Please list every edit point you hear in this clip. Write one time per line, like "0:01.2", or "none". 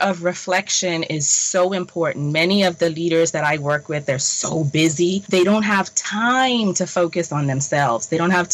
0:05.2